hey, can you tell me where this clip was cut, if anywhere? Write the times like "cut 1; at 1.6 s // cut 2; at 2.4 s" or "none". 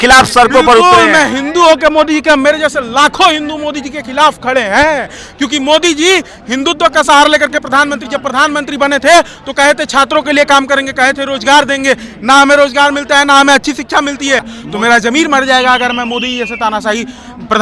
cut 1; at 14.5 s